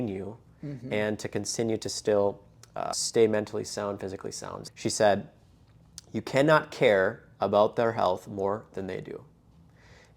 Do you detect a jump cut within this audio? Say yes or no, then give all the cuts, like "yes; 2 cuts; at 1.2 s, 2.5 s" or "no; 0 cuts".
yes; 1 cut; at 4.7 s